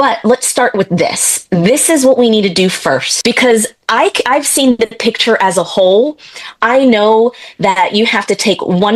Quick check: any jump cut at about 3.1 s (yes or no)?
yes